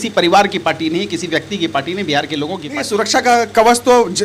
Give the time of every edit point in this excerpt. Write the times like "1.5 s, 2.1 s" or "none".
2.7 s